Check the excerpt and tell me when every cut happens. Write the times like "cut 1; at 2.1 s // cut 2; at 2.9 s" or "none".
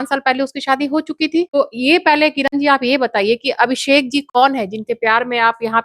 cut 1; at 1.5 s